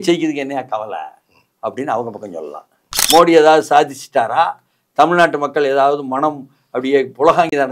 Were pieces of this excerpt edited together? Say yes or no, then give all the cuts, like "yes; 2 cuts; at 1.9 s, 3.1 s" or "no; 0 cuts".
yes; 1 cut; at 2.9 s